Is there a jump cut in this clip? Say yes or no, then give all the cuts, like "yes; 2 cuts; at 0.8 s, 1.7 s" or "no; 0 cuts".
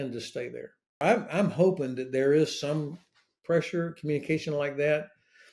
yes; 1 cut; at 1.0 s